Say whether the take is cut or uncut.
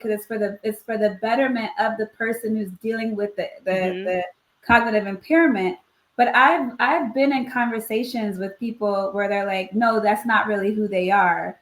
uncut